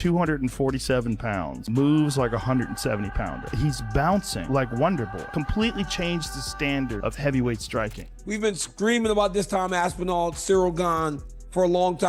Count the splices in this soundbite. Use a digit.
1